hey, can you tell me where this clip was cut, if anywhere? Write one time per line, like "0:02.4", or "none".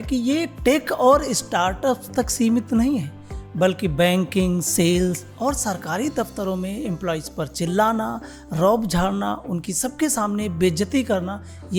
none